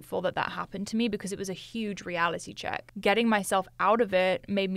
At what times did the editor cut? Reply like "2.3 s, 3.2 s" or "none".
2.9 s